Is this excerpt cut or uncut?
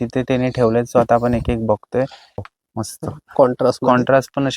cut